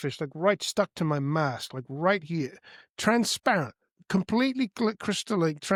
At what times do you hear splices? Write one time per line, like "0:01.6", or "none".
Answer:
none